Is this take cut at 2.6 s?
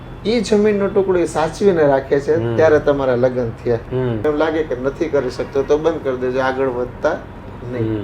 no; 1 cut; at 4.2 s

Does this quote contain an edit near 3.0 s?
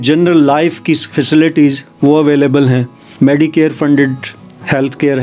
yes; 1 cut; at 3.0 s

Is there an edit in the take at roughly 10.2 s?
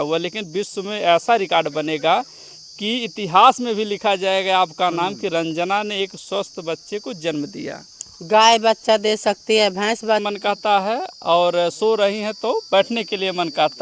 yes; 1 cut; at 10.2 s

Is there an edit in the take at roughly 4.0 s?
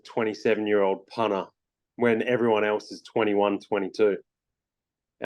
no; 0 cuts

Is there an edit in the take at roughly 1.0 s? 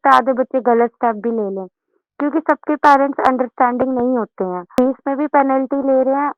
no; 1 cut; at 4.8 s

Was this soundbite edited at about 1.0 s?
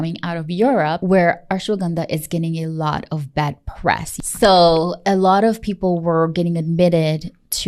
yes; 3 cuts; at 1.0 s, 4.1 s, 5.0 s

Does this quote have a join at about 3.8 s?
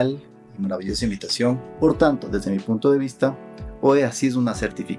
no; 1 cut; at 1.7 s

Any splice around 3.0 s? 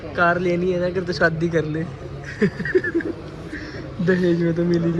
no; 0 cuts

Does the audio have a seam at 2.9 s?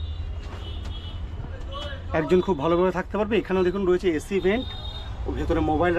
no; 0 cuts

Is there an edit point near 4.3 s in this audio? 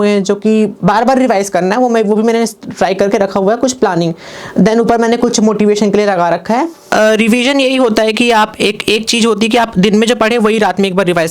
no; 1 cut; at 6.8 s

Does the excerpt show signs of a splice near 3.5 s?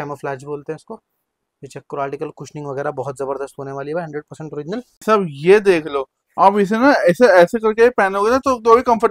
no; 1 cut; at 5.0 s

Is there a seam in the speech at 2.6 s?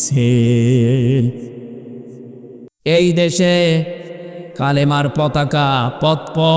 yes; 1 cut; at 2.6 s

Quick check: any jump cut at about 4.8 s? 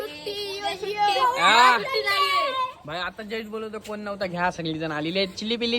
no; 0 cuts

